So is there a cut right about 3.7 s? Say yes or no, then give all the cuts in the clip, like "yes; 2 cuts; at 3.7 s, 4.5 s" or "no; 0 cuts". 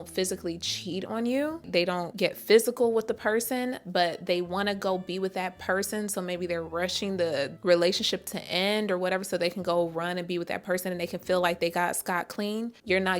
no; 1 cut; at 1.6 s